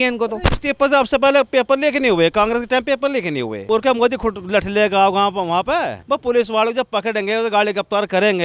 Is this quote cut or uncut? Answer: cut